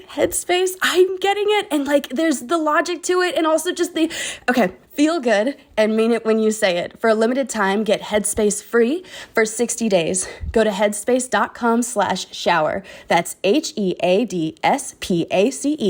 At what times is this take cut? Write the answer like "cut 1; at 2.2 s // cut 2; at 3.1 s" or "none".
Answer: none